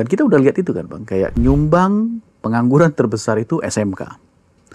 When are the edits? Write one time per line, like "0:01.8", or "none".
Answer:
0:01.3